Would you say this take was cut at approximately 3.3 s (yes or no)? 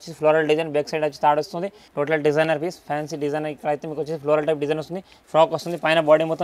no